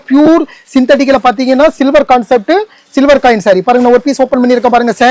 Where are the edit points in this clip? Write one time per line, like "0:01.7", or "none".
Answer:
none